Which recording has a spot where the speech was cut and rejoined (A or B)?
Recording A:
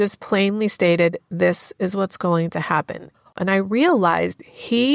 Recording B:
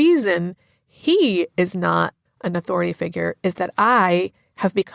A